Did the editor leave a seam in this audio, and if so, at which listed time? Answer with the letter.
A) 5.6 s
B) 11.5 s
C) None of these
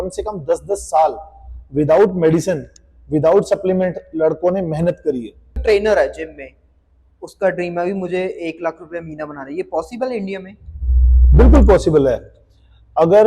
A